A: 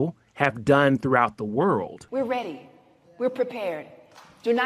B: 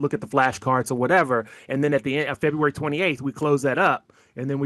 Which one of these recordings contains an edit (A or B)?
A